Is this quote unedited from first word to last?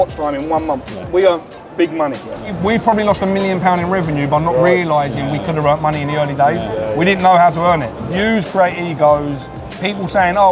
no; 3 cuts; at 1.0 s, 2.5 s, 7.9 s

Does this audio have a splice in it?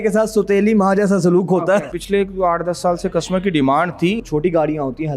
yes; 2 cuts; at 1.9 s, 4.2 s

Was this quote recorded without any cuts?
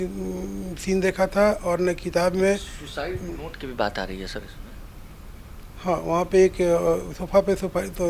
yes; 0 cuts

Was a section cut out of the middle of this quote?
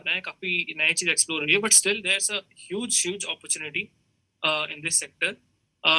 no; 0 cuts

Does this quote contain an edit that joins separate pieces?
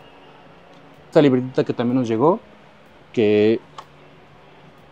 yes; 1 cut; at 1.1 s

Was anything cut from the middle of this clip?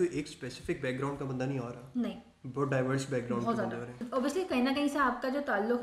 no; 0 cuts

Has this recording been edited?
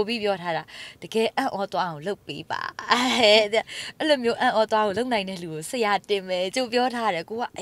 no; 0 cuts

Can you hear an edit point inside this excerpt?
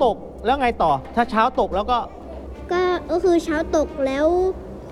no; 0 cuts

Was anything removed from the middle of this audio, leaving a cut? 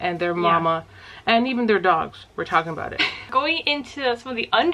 yes; 1 cut; at 3.3 s

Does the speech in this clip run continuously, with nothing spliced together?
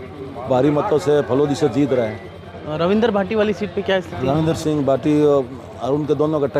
yes; 0 cuts

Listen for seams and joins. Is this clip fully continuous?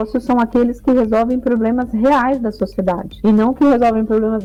yes; 0 cuts

